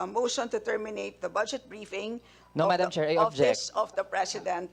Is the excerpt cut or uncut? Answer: uncut